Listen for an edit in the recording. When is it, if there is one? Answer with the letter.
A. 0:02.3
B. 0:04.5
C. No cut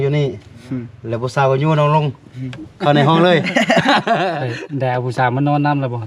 B